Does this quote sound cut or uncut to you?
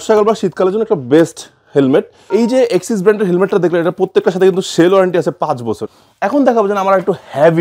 cut